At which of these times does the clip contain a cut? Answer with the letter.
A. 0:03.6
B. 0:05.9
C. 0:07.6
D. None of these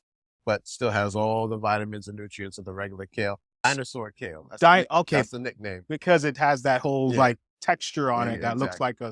A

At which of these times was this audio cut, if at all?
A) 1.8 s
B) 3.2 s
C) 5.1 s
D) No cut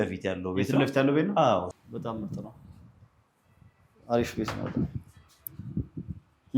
A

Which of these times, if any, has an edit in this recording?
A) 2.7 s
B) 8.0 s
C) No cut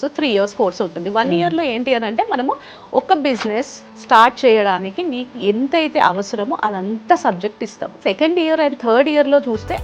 B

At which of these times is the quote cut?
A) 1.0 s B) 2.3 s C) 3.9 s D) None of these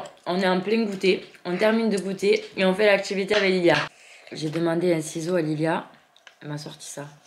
C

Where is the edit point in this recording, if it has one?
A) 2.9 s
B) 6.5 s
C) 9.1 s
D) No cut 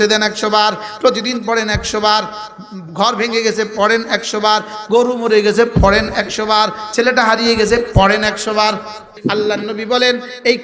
C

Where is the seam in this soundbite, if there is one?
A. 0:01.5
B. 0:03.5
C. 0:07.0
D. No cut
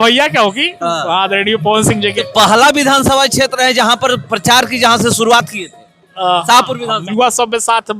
C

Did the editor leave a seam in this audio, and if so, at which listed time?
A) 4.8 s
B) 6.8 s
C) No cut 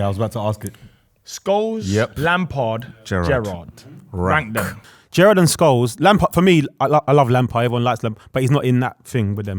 A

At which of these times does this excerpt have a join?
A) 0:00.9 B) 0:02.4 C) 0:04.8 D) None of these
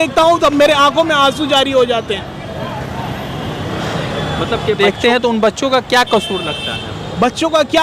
C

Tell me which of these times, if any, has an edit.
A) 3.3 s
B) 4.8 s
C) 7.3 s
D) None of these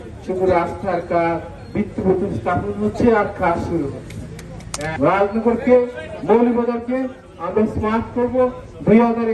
B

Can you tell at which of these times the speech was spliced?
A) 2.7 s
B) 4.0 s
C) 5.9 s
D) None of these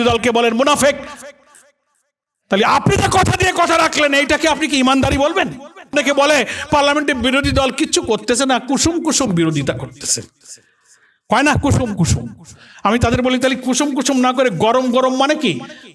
C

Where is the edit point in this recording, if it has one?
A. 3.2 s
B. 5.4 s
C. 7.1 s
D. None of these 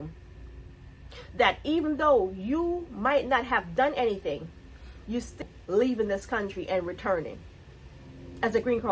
B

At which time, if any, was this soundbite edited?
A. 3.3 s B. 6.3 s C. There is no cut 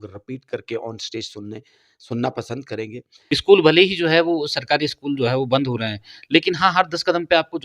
A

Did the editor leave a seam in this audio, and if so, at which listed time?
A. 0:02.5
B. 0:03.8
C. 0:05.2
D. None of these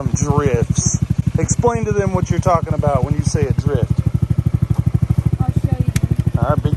C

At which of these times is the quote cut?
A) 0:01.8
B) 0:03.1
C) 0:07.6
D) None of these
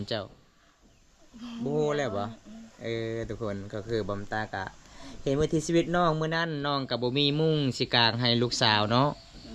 D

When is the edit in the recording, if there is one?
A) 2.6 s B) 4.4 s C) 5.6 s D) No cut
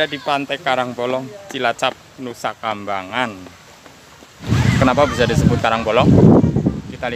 B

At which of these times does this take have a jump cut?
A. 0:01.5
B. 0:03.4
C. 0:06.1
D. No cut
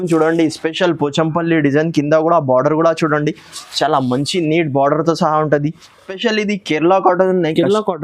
C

